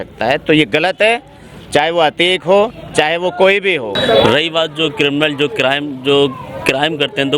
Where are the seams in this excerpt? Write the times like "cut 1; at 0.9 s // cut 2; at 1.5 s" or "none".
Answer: cut 1; at 4.0 s